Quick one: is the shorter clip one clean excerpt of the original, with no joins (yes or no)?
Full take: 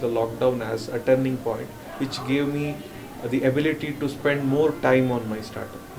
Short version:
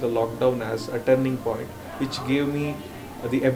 yes